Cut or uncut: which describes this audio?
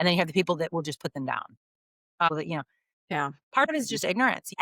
uncut